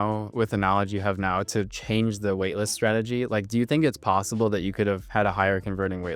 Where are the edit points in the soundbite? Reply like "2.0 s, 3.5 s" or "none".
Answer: none